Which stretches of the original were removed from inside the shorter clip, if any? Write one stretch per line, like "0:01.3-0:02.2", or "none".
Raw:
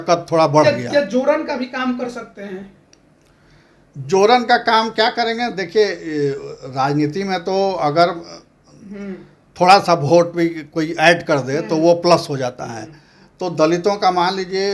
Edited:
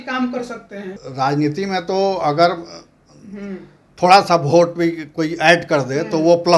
0:02.7-0:06.6